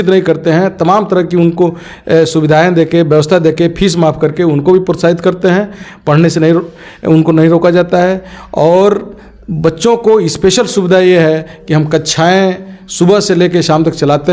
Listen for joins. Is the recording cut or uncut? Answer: uncut